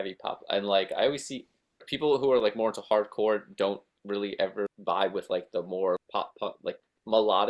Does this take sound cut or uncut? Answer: cut